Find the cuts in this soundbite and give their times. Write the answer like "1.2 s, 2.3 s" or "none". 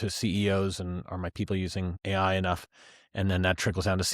2.0 s

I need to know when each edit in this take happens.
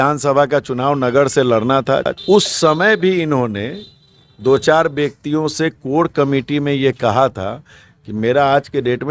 2.1 s

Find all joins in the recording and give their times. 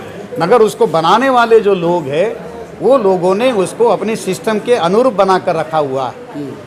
none

